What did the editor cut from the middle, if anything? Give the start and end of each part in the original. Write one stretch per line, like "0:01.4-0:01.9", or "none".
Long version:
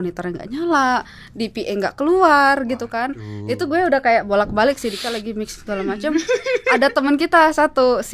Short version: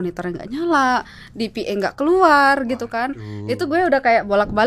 none